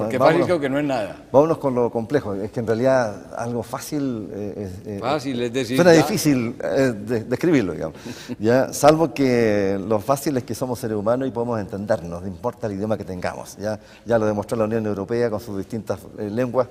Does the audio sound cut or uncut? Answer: uncut